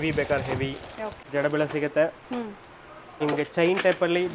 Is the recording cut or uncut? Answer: cut